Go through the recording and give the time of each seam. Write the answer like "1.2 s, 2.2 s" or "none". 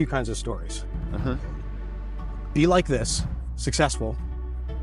none